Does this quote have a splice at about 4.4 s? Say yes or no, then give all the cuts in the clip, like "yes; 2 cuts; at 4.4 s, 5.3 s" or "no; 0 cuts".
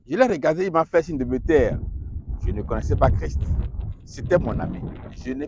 no; 0 cuts